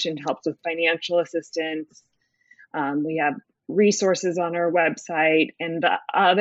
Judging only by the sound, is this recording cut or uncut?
uncut